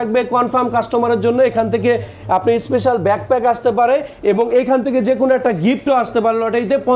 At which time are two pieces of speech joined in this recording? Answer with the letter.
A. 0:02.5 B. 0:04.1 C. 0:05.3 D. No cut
D